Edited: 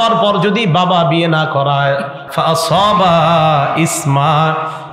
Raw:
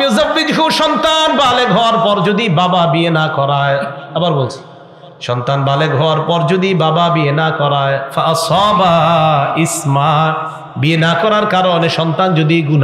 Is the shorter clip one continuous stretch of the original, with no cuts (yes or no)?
no